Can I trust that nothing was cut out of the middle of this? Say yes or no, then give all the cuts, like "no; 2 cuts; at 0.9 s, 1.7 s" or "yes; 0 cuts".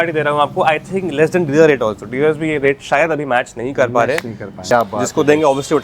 no; 1 cut; at 4.7 s